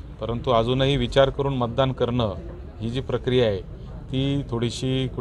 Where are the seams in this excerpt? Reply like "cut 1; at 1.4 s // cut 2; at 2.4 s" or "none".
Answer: none